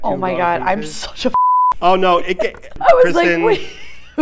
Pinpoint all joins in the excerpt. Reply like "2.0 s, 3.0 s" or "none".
2.7 s